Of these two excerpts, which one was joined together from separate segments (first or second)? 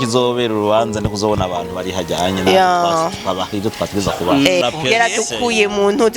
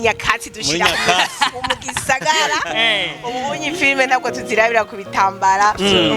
first